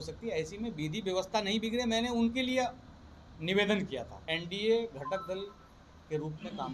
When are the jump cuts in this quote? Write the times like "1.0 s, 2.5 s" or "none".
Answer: 4.2 s